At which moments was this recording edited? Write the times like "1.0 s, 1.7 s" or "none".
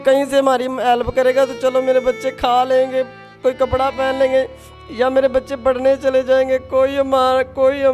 none